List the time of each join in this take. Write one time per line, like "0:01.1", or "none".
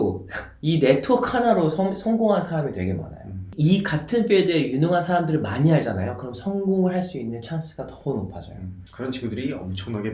0:08.7